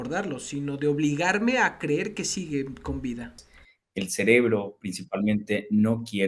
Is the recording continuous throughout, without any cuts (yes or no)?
no